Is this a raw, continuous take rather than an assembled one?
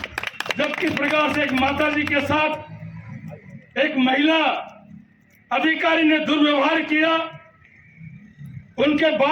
yes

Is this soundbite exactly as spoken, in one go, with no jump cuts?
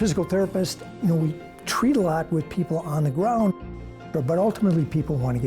no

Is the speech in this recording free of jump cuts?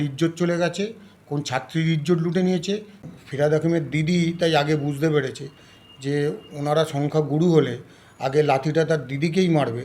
no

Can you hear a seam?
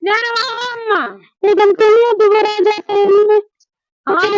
no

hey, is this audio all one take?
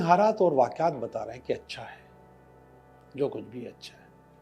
yes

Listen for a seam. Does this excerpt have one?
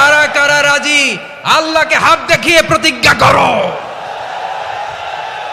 no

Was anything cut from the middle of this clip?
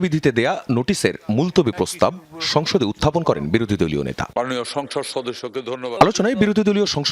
yes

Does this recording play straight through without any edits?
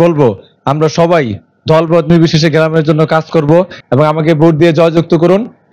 no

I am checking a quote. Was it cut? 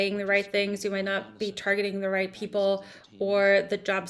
no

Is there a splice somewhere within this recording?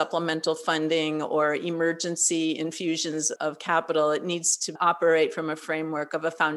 no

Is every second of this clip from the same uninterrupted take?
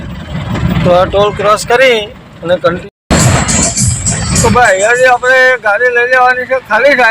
no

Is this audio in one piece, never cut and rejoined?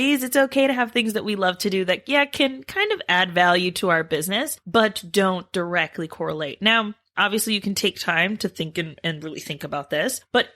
yes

